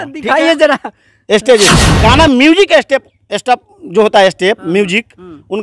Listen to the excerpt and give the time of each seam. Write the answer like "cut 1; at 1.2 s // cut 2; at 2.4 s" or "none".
cut 1; at 1.9 s